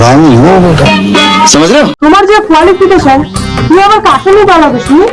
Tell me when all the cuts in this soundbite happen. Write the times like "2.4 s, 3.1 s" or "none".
1.9 s